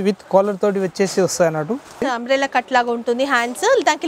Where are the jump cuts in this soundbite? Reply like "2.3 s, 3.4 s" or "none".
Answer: 2.0 s

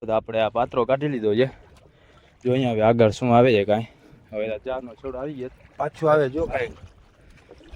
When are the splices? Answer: none

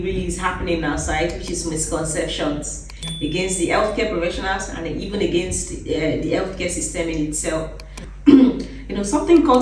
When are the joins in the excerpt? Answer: none

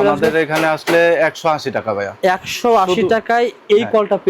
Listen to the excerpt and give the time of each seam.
none

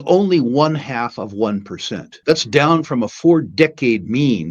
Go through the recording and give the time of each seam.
2.1 s

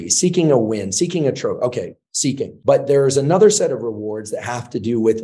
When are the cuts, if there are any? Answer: 2.5 s

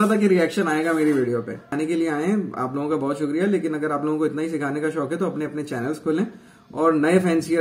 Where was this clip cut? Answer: 1.7 s

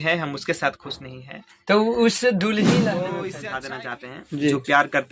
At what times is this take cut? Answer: 3.7 s

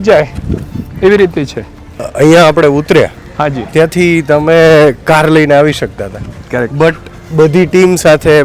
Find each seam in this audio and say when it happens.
2.1 s

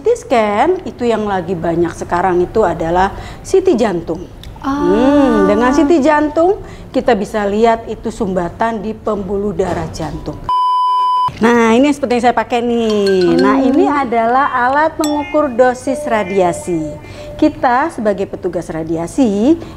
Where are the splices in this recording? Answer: 3.3 s, 10.7 s

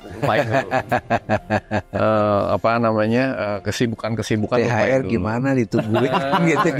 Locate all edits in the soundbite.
none

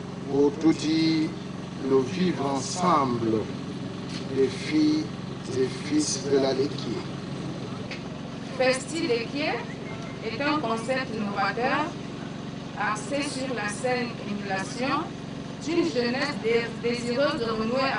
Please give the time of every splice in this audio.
7.9 s

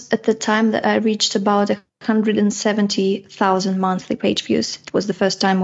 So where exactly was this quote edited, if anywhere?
none

